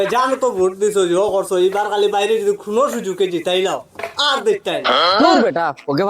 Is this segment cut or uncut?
cut